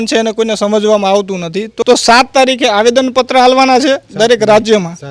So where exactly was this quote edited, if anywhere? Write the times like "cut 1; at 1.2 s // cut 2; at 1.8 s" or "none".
cut 1; at 1.7 s